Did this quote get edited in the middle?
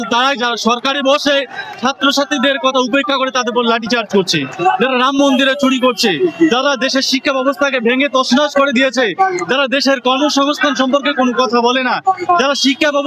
no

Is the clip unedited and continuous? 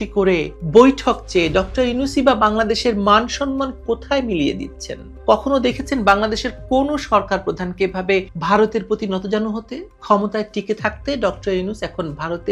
yes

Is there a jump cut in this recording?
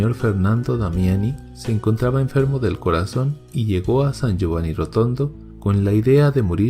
yes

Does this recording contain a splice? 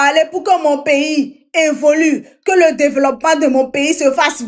no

